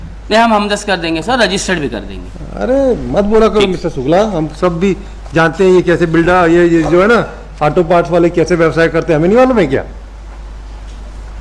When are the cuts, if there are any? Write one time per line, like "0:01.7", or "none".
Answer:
none